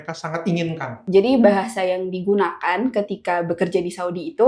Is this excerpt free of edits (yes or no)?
no